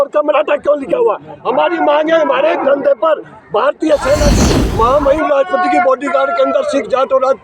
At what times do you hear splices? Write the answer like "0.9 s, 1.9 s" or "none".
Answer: 4.4 s